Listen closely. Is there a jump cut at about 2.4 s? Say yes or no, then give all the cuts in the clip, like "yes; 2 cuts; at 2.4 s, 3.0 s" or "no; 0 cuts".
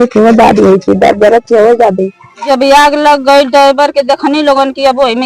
yes; 1 cut; at 2.4 s